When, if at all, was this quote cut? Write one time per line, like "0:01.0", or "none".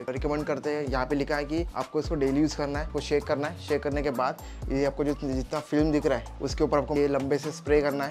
0:01.8
0:02.9
0:06.3